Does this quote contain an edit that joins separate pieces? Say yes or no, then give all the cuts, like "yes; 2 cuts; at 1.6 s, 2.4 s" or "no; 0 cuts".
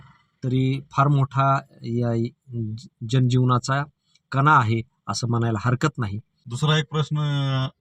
no; 0 cuts